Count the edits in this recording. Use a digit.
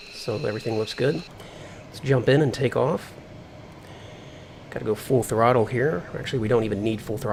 0